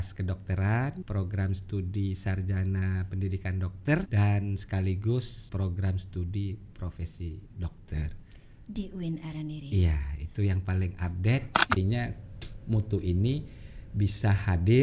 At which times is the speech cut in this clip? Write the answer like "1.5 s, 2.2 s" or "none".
1.0 s, 4.1 s, 5.4 s, 11.8 s